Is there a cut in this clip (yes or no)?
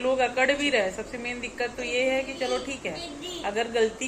no